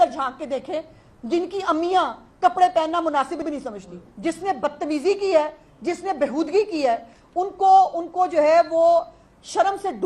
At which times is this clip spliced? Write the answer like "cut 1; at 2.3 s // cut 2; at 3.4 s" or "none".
cut 1; at 4.0 s